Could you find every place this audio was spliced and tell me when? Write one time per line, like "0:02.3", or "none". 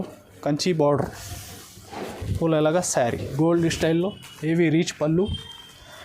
0:03.3